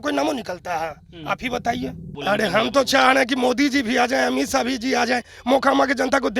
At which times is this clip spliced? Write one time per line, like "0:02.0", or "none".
0:02.1